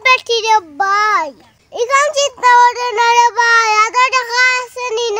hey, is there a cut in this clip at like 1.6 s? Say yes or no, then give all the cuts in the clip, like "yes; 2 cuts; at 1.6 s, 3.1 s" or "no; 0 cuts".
yes; 1 cut; at 1.6 s